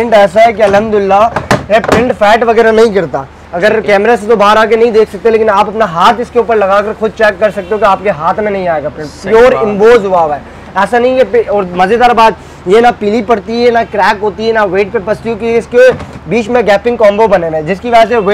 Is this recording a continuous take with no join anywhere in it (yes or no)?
yes